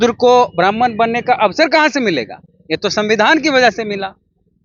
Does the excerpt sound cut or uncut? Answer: uncut